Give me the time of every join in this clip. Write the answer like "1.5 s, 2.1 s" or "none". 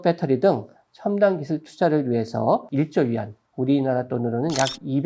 2.7 s